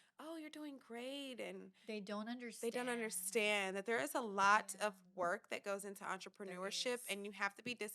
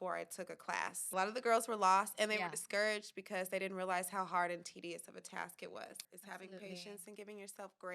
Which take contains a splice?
second; 2 cuts; at 1.1 s, 6.1 s

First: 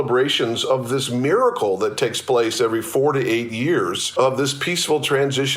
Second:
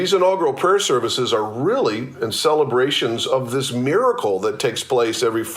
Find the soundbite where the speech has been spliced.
first; 1 cut; at 4.0 s

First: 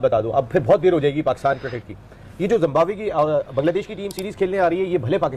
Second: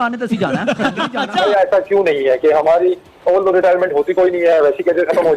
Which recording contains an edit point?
second; 1 cut; at 1.4 s

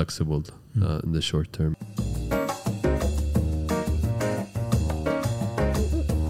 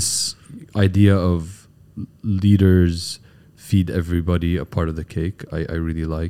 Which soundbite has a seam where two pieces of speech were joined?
first; 1 cut; at 1.8 s

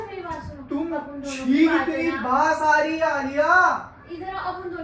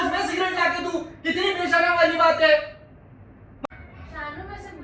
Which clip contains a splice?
second; 1 cut; at 3.7 s

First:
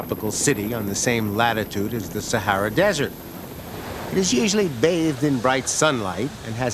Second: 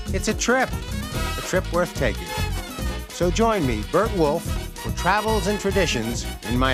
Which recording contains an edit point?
first; 1 cut; at 1.7 s

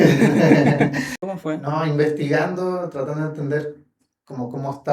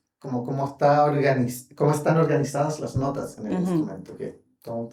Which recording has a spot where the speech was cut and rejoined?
first; 1 cut; at 1.0 s

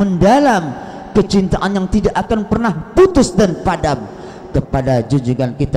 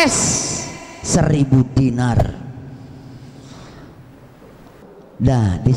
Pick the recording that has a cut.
second; 1 cut; at 4.8 s

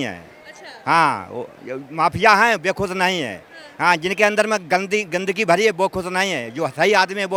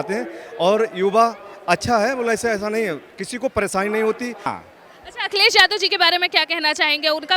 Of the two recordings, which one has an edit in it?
second; 1 cut; at 4.5 s

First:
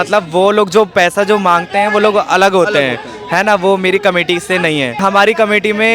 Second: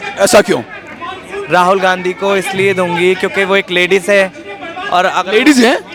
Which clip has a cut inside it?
first; 1 cut; at 5.0 s

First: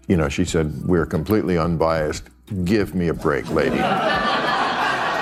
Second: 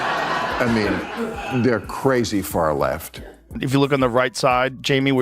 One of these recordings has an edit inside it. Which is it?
second; 1 cut; at 3.4 s

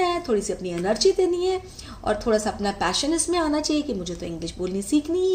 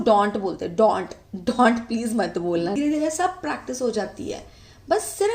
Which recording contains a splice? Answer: second; 1 cut; at 2.8 s

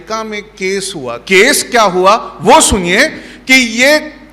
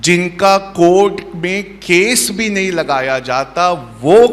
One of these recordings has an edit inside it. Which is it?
first; 1 cut; at 1.2 s

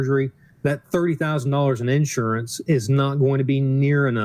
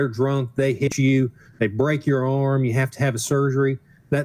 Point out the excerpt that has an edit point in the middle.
second; 1 cut; at 0.9 s

